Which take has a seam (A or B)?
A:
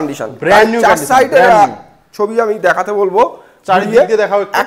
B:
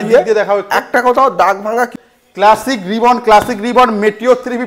B